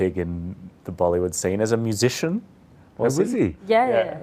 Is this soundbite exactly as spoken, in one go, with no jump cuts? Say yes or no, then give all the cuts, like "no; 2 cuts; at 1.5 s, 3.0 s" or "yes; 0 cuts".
yes; 0 cuts